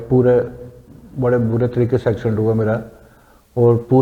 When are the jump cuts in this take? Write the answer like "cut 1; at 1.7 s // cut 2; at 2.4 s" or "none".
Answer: none